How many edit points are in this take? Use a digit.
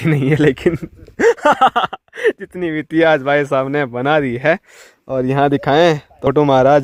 0